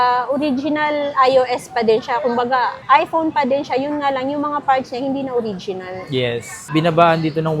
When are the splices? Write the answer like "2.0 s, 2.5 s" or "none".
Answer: 6.7 s